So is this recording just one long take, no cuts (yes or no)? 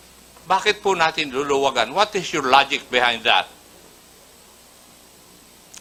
yes